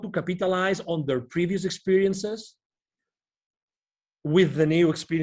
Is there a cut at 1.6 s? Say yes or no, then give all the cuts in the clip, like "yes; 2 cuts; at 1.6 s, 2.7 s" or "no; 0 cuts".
no; 0 cuts